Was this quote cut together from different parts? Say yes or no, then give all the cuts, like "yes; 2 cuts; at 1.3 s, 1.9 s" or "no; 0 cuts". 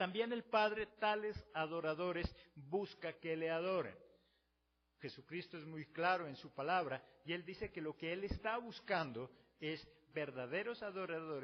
no; 0 cuts